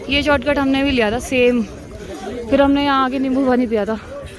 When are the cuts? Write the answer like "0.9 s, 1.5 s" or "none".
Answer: none